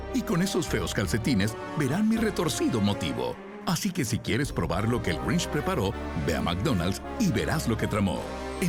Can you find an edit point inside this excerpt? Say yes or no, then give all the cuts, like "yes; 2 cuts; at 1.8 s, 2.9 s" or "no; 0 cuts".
no; 0 cuts